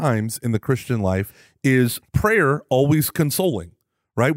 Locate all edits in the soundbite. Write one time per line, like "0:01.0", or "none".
0:01.4
0:02.0